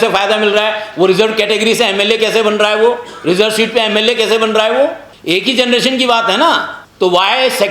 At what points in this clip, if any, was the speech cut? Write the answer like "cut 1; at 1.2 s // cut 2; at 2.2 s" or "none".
cut 1; at 5.1 s // cut 2; at 6.8 s